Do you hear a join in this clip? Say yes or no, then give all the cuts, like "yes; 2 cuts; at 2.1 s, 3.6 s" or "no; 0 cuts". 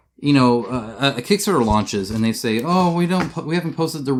no; 0 cuts